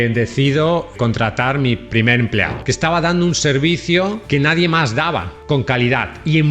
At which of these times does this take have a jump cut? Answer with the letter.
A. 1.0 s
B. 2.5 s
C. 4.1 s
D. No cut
B